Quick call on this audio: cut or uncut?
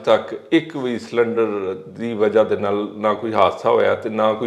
uncut